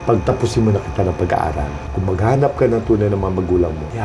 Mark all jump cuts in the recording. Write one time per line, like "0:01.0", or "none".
0:01.8

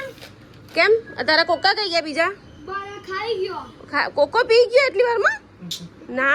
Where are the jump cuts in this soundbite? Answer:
none

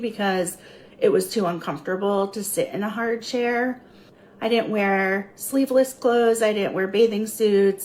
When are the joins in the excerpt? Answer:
0:03.6
0:07.1

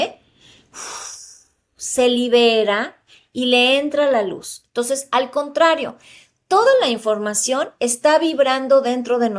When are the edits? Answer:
none

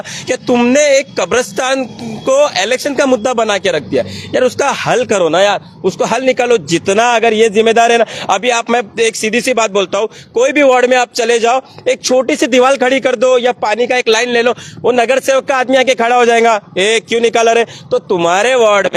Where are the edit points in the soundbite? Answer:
none

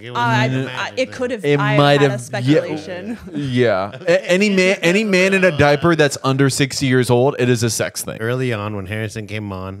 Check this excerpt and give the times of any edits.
0:08.1

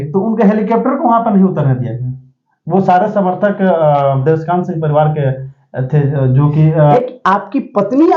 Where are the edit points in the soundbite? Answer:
0:06.9

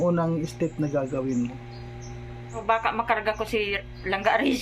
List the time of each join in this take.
0:02.6

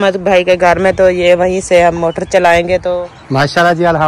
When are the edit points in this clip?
0:02.9

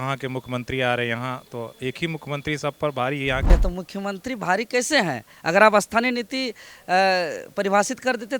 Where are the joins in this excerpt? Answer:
0:03.5

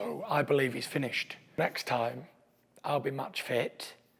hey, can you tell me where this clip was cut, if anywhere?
0:01.6

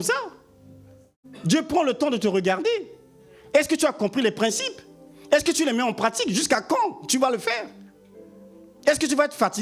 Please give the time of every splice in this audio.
none

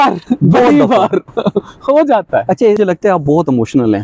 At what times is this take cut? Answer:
0:02.8

